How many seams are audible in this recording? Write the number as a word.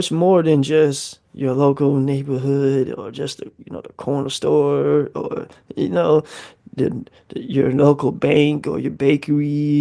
zero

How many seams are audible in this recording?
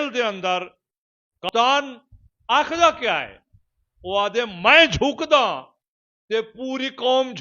one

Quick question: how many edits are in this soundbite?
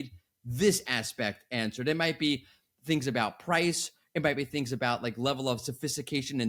zero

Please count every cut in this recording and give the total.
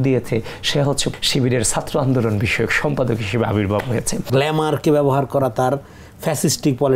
two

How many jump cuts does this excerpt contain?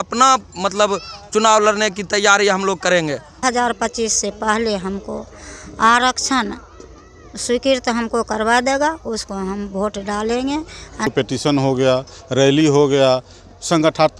two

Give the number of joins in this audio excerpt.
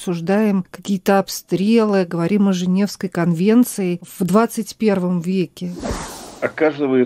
two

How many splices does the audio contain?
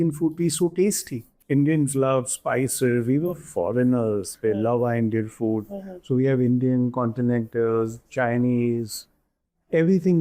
one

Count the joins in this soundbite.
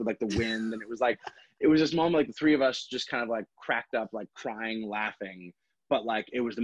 zero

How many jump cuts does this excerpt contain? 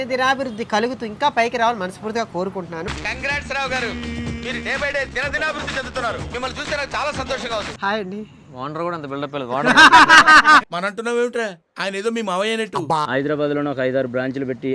two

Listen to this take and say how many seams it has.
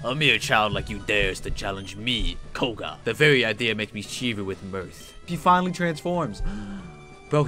two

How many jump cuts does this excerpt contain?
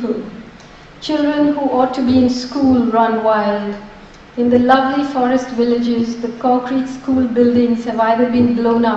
one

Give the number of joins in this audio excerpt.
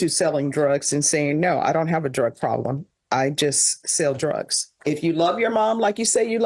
one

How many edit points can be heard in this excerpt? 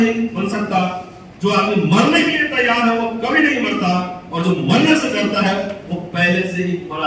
zero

